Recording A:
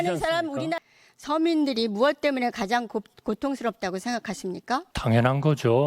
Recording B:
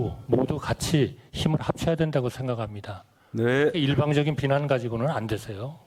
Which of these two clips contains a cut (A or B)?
A